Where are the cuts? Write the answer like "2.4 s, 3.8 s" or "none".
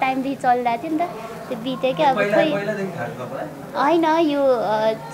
none